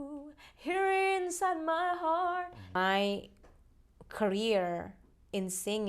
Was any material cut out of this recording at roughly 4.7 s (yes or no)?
no